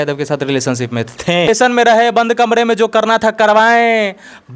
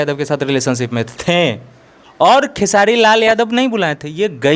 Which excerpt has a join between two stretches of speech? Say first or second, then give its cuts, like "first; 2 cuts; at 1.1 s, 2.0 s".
first; 1 cut; at 1.5 s